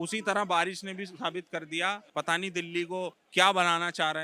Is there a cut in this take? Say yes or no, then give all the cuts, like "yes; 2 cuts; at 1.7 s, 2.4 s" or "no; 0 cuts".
yes; 2 cuts; at 2.1 s, 3.2 s